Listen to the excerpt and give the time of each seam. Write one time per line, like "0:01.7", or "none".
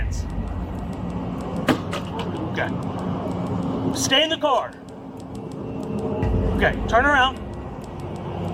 none

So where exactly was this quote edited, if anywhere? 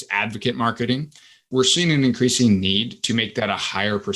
0:01.5

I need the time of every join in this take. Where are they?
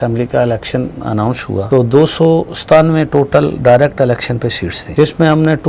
0:01.7
0:04.9

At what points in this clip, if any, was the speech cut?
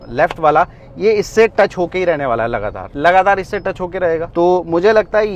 none

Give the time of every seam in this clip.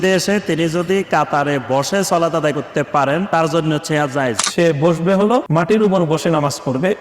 0:03.3
0:04.4
0:05.5

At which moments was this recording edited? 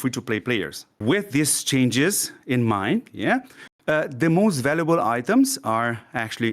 0:01.0

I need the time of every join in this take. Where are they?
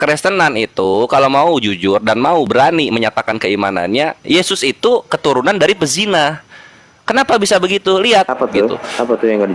0:08.3

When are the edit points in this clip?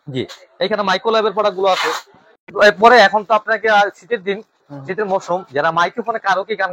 none

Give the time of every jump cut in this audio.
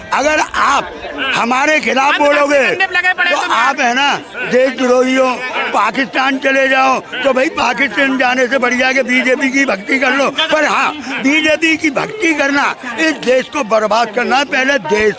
none

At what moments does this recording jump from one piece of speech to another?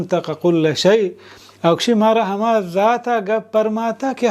none

